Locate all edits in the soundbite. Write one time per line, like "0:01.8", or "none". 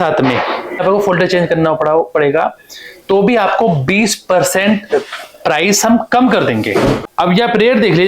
0:00.8
0:07.1